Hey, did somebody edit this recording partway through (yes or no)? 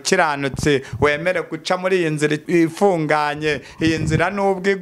yes